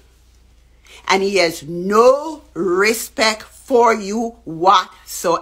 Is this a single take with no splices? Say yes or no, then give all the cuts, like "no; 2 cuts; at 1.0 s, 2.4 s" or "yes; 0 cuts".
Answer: yes; 0 cuts